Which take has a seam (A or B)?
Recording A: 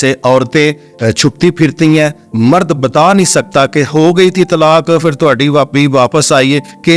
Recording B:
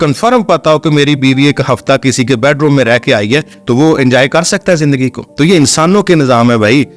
B